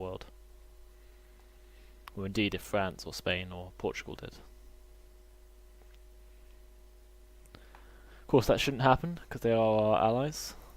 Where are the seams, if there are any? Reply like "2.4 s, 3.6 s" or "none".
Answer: 9.6 s